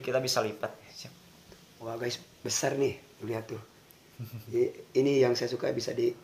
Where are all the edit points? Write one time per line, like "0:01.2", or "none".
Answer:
0:01.0